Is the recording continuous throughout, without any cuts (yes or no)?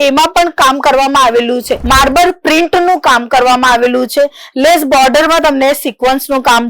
no